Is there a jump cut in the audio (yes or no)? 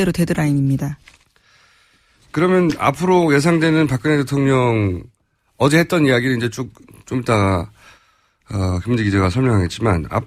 no